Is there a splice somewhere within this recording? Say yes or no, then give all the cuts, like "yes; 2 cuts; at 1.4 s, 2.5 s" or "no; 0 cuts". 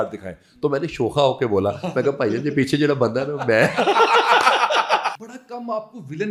yes; 1 cut; at 5.1 s